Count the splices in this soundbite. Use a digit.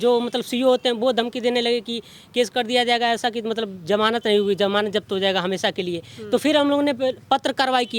0